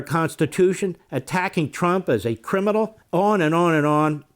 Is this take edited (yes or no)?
yes